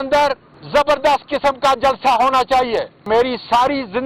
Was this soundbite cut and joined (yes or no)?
yes